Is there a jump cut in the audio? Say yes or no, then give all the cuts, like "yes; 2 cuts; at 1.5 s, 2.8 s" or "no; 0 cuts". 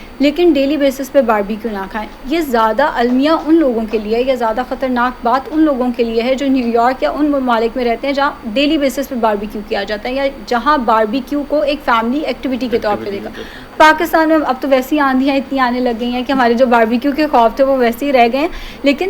no; 0 cuts